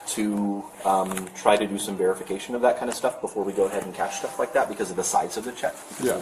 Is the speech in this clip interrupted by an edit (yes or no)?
no